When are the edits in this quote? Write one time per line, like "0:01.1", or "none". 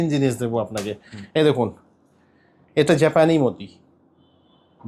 none